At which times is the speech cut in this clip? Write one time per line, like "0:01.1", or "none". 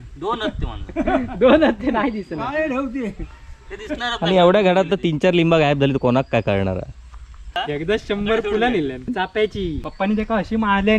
0:07.5
0:09.4